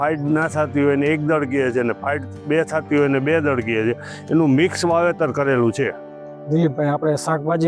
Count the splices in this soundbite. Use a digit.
0